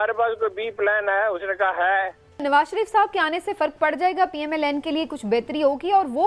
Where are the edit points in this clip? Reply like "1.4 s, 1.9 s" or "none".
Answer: 2.4 s